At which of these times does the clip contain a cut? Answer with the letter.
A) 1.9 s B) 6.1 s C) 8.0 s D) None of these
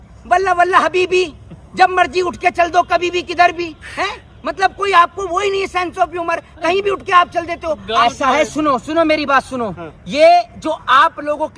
C